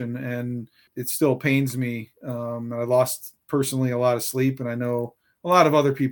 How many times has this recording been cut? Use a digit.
1